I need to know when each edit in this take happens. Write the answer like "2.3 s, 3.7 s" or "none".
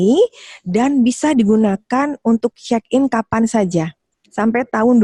none